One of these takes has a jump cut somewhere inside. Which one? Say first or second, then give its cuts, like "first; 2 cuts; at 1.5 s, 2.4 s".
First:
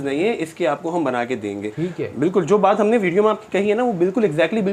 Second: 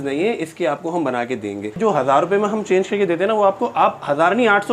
second; 1 cut; at 1.7 s